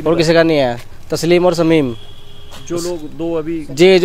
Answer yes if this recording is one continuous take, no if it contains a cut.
yes